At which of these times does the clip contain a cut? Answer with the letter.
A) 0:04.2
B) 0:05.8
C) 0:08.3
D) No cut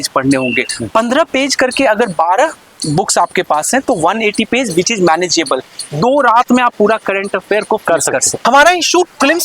C